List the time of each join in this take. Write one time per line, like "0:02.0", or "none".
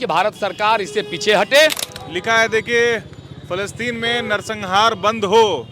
0:01.9